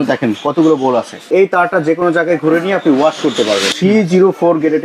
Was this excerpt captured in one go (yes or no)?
no